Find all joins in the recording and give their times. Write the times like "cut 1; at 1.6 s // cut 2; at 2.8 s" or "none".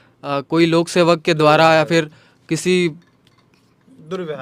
none